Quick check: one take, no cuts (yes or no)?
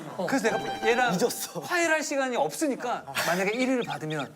no